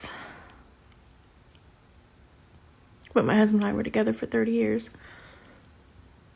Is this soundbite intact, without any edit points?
no; 1 cut; at 1.5 s

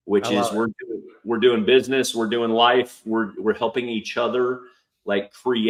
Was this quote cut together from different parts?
no; 0 cuts

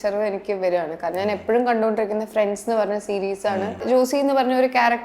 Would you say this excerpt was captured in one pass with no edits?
no; 1 cut; at 3.8 s

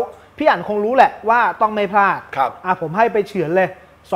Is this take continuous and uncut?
yes; 0 cuts

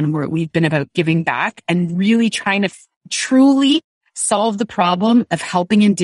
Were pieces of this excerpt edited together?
no; 0 cuts

